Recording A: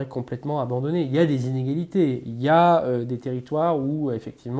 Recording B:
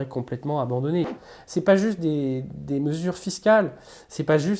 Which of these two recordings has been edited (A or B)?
B